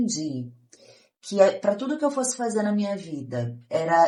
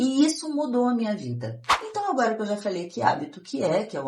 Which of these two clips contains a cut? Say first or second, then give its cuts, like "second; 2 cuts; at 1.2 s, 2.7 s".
second; 1 cut; at 1.8 s